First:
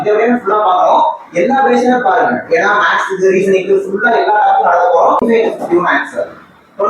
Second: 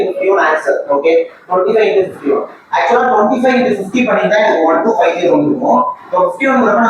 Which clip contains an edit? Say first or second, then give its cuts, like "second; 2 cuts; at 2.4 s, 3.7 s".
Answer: first; 1 cut; at 5.2 s